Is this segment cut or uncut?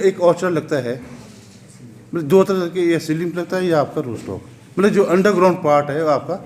uncut